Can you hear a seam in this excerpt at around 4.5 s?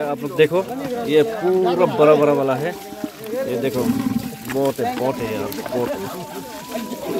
no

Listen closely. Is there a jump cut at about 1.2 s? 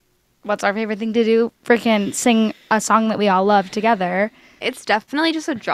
no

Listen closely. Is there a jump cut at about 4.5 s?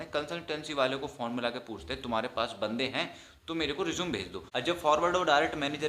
yes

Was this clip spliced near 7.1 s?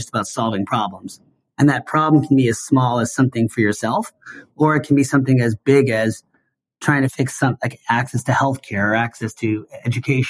yes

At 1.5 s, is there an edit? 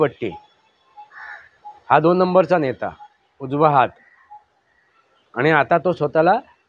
no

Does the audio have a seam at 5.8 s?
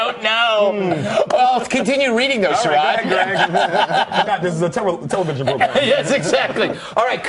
no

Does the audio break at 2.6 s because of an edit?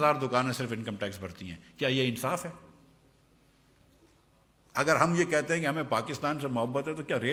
no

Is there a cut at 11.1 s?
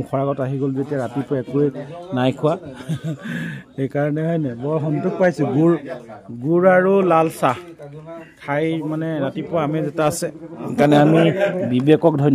no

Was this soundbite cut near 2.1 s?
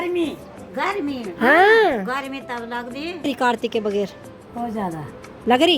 no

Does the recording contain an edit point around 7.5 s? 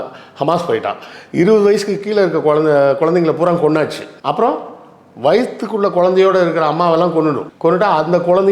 yes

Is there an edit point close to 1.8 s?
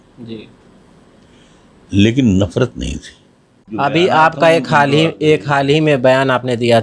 no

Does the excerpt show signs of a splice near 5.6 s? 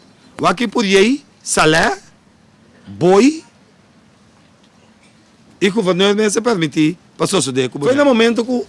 no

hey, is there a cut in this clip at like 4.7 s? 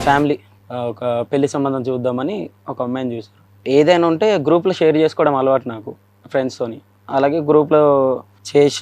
no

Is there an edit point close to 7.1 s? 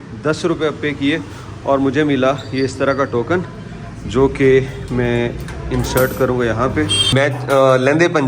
yes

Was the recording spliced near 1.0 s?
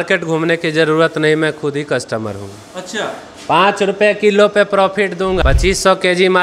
no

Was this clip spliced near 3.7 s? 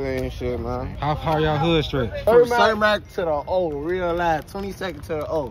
no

